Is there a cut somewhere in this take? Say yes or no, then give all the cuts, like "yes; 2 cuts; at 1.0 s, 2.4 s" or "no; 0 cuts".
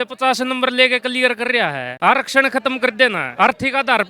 yes; 2 cuts; at 1.9 s, 3.2 s